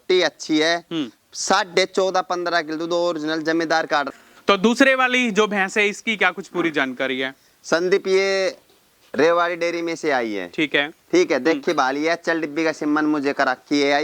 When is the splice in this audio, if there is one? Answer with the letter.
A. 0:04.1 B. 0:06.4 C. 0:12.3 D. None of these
A